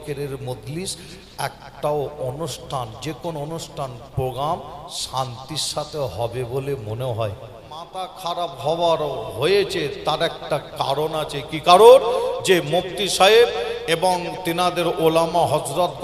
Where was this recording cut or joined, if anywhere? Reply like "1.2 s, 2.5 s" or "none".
8.0 s